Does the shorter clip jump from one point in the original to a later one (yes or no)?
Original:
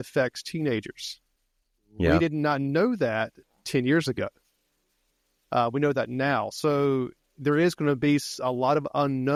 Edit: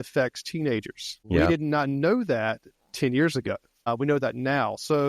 yes